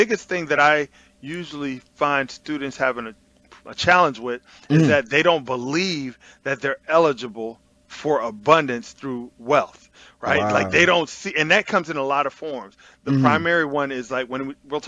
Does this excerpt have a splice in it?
no; 0 cuts

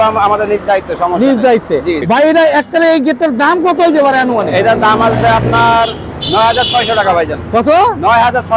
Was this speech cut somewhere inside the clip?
yes; 1 cut; at 2.0 s

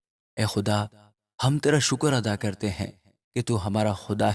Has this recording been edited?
no; 0 cuts

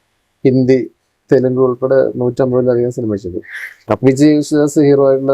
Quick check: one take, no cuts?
yes; 0 cuts

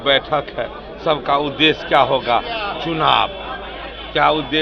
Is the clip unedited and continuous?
yes; 0 cuts

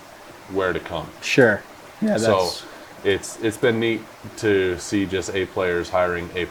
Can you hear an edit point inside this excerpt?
no; 0 cuts

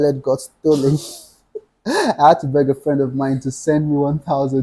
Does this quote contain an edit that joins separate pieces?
no; 0 cuts

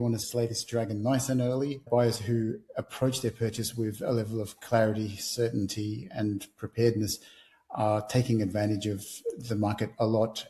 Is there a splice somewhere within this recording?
yes; 1 cut; at 1.9 s

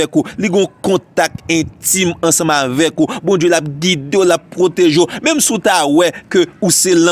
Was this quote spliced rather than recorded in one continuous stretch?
no; 0 cuts

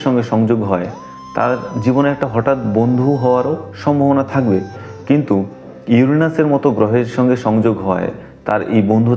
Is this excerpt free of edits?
yes; 0 cuts

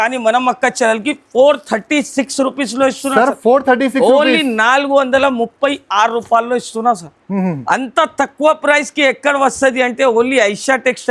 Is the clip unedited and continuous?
yes; 0 cuts

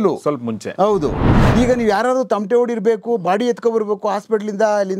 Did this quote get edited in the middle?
yes; 1 cut; at 1.3 s

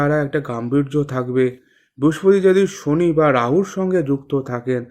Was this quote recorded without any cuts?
yes; 0 cuts

